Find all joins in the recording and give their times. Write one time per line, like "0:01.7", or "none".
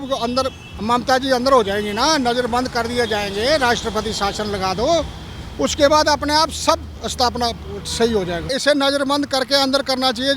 0:07.0
0:08.5